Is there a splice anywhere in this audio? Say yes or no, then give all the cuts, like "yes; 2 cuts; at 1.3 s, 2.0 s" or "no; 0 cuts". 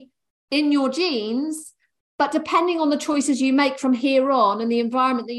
no; 0 cuts